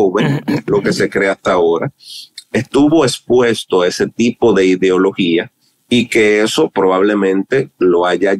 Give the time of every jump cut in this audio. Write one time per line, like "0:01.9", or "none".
none